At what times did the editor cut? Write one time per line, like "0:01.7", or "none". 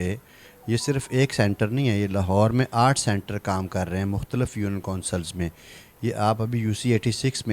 none